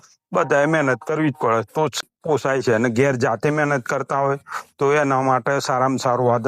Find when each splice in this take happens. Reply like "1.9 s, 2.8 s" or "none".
2.1 s